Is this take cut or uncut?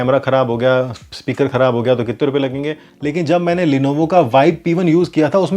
cut